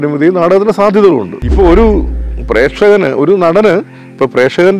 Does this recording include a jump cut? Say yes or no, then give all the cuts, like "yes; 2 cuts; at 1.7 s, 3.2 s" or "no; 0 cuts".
yes; 1 cut; at 1.4 s